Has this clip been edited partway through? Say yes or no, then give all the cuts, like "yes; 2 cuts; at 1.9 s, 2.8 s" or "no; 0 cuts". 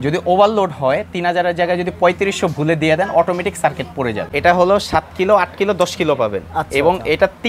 yes; 1 cut; at 4.2 s